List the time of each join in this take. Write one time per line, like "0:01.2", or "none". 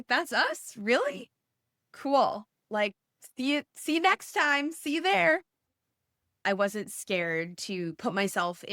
0:06.2